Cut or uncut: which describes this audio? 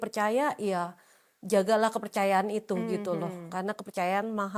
uncut